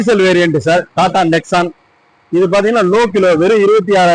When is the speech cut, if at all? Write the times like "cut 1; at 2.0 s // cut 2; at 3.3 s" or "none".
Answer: none